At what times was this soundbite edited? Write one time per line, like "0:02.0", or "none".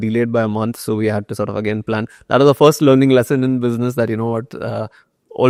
none